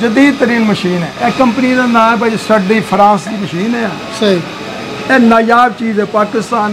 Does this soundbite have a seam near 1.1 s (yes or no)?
yes